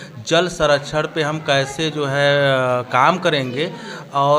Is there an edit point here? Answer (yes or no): no